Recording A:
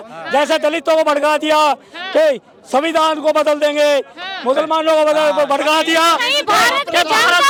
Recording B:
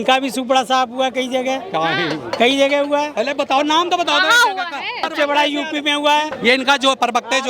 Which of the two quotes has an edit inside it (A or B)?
B